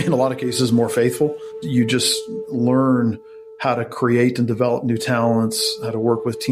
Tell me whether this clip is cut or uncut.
uncut